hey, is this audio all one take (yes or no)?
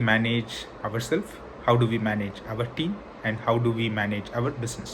yes